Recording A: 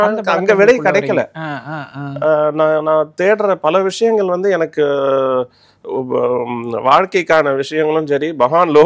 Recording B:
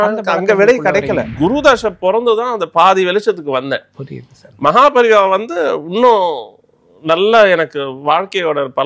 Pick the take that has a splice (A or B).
B